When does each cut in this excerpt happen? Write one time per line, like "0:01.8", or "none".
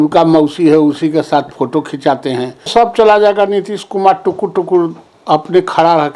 0:02.7